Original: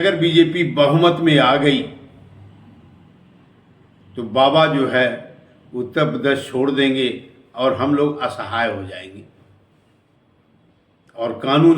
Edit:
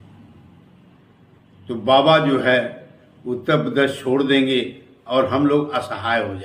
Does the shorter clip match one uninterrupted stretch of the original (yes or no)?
yes